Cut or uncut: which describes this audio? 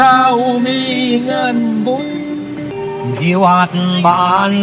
cut